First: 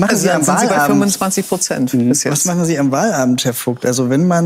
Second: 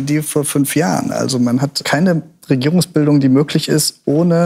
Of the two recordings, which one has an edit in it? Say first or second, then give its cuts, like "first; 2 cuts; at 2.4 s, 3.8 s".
second; 1 cut; at 1.8 s